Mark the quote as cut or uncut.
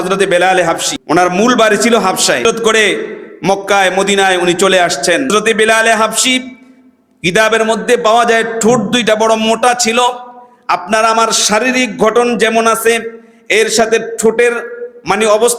cut